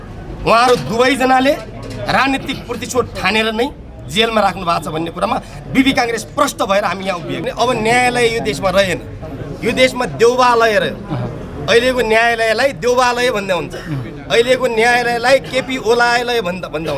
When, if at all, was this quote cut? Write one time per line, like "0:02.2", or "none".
0:07.4